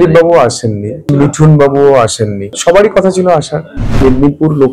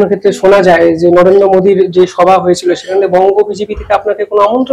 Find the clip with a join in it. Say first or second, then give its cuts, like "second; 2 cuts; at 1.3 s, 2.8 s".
first; 3 cuts; at 1.0 s, 2.5 s, 4.0 s